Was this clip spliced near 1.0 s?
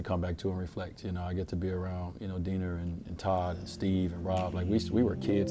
no; 0 cuts

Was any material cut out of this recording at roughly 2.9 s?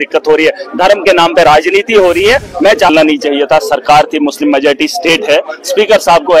yes; 1 cut; at 2.9 s

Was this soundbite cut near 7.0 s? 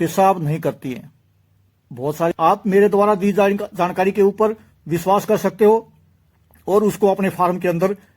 no; 1 cut; at 2.3 s

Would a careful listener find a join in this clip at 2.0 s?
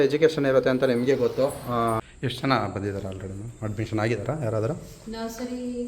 yes; 1 cut; at 2.0 s

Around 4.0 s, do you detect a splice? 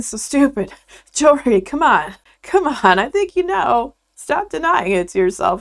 no; 0 cuts

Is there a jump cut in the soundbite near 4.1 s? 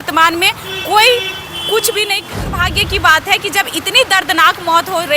no; 1 cut; at 2.4 s

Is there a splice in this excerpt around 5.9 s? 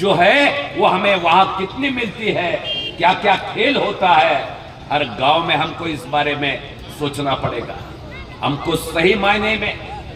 no; 0 cuts

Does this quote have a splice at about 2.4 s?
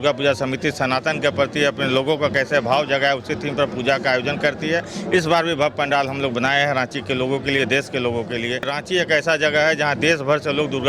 no; 1 cut; at 8.7 s

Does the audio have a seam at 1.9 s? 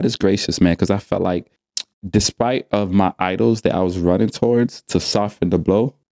yes; 1 cut; at 1.9 s

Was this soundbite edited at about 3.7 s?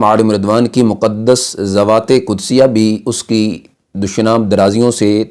no; 0 cuts

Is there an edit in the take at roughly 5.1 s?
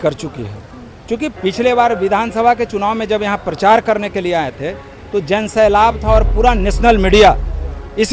no; 1 cut; at 1.3 s

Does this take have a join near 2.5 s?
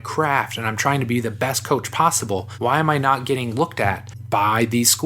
yes; 2 cuts; at 2.5 s, 4.1 s

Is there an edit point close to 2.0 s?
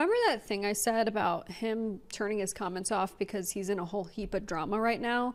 no; 0 cuts

